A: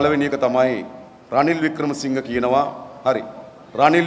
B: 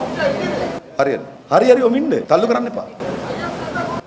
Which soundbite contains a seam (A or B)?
B